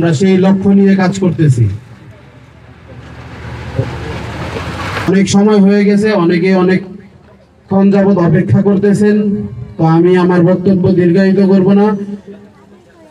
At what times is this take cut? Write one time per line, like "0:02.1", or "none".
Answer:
none

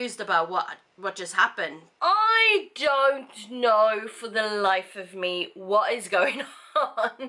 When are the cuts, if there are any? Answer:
0:01.8

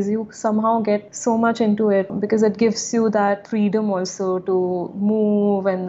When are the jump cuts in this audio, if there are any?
0:01.1
0:02.1

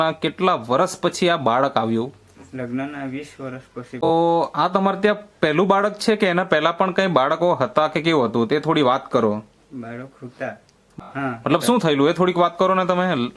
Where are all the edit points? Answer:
0:04.1
0:11.0

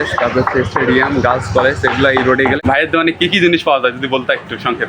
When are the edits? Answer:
0:02.6

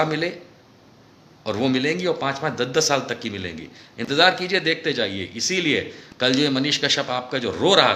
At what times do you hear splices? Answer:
none

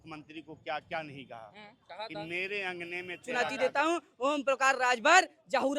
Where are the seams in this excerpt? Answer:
0:03.4

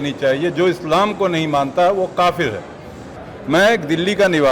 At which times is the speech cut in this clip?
0:03.1

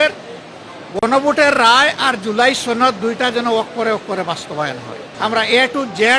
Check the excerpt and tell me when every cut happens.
0:05.0

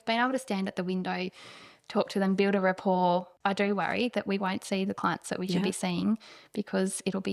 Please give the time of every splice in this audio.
0:03.3

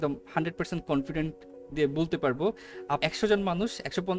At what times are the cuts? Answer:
0:03.0

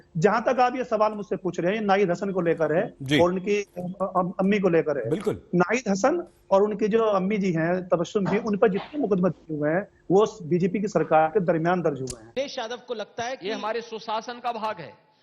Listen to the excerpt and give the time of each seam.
0:12.3

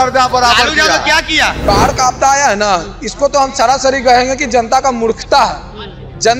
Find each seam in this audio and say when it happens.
0:01.6

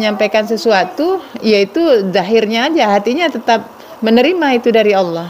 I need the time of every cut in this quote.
0:03.9

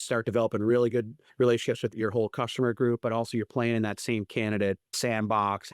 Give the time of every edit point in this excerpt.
0:01.2

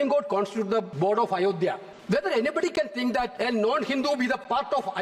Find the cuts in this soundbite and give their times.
0:00.9
0:01.9
0:03.3

